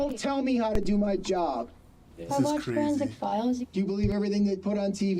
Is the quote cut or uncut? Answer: cut